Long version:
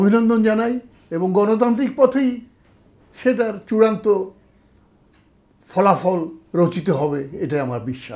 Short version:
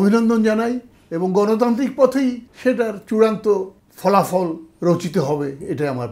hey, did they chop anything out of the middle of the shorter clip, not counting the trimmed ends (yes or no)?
yes